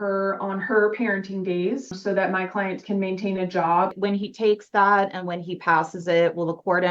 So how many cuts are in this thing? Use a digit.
2